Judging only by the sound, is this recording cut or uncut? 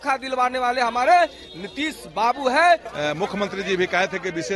cut